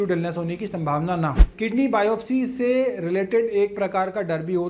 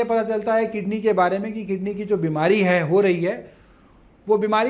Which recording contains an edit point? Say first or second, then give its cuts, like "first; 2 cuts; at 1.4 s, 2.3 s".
first; 1 cut; at 1.3 s